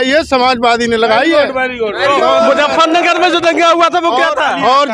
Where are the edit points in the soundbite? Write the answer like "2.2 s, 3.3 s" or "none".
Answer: none